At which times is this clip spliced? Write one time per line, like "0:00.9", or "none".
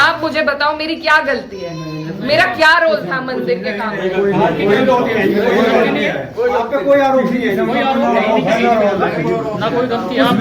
none